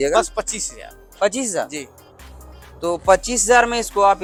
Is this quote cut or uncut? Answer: uncut